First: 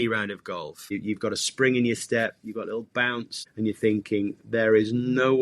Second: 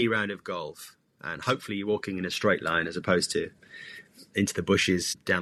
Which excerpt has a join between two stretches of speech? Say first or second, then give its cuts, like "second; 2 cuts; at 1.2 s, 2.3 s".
first; 2 cuts; at 0.9 s, 3.4 s